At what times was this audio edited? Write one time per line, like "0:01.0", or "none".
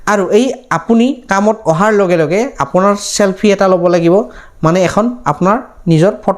none